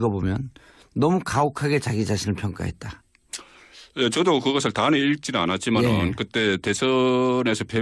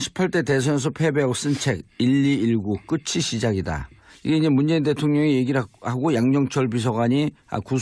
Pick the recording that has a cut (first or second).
first